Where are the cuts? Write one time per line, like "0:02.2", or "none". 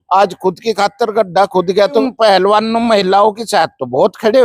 0:02.0